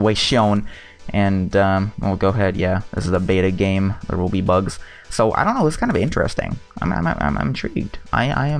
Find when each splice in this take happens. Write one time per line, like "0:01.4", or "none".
0:07.1